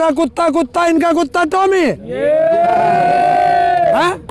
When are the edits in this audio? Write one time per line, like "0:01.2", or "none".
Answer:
none